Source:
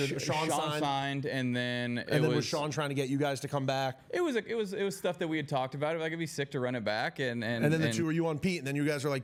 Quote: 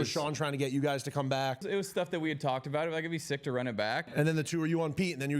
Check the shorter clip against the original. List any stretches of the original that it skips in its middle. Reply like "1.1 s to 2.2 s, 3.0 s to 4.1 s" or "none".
4.0 s to 4.7 s, 7.2 s to 7.6 s